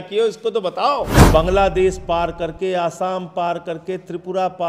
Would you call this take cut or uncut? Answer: cut